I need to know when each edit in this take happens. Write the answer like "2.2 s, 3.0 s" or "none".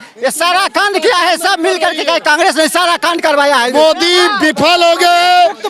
3.7 s